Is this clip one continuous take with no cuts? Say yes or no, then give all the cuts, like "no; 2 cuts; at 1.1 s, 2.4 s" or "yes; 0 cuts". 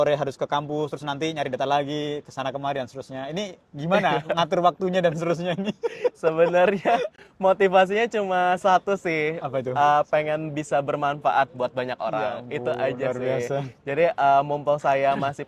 yes; 0 cuts